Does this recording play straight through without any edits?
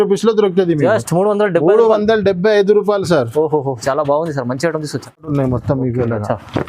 no; 1 cut; at 5.3 s

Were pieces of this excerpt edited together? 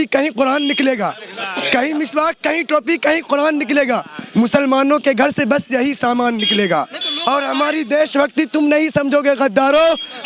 no; 0 cuts

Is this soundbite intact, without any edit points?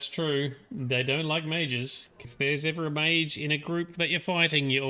no; 1 cut; at 2.2 s

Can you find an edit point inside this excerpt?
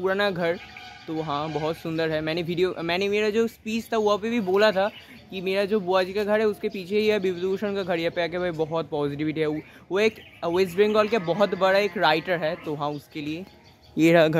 no; 0 cuts

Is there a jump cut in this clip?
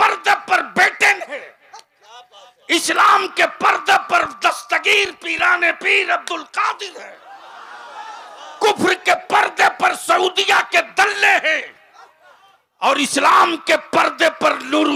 no; 0 cuts

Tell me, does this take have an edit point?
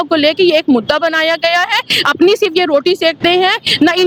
no; 0 cuts

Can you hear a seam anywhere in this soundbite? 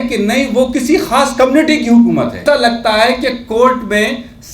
yes; 1 cut; at 2.4 s

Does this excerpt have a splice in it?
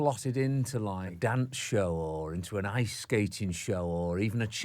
yes; 1 cut; at 1.1 s

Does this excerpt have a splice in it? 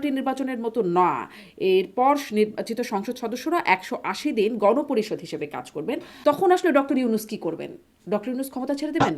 yes; 1 cut; at 6.1 s

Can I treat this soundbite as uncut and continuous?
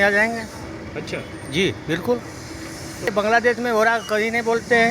no; 1 cut; at 3.1 s

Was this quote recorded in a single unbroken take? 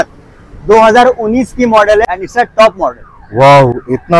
no; 1 cut; at 2.0 s

